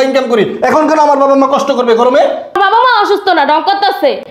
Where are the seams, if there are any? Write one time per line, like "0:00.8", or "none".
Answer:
0:02.6

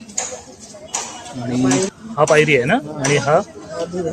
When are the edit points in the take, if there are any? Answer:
0:01.9

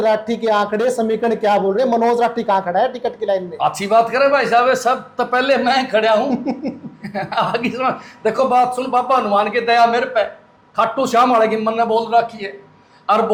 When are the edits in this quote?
none

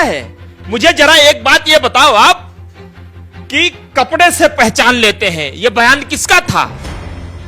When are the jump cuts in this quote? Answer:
none

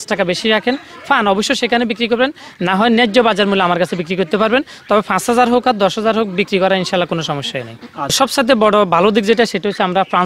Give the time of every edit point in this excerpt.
0:08.1

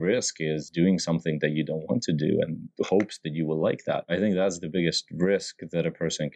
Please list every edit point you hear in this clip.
0:04.1

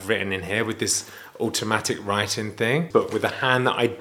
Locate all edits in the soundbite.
0:02.9

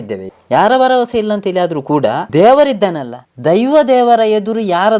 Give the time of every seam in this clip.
0:02.2

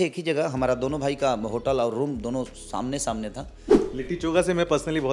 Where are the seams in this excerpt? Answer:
0:03.7

